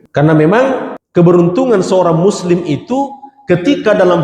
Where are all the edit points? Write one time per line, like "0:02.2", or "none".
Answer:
0:01.0